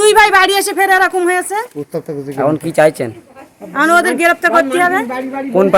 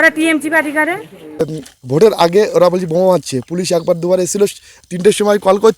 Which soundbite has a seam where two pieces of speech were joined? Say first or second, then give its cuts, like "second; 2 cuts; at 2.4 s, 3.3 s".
second; 1 cut; at 1.5 s